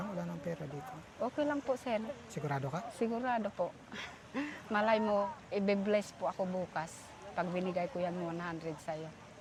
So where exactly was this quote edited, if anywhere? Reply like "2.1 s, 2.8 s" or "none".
none